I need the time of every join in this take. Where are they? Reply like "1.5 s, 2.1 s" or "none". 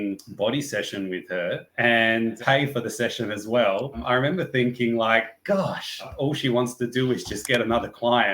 2.4 s, 4.0 s, 6.1 s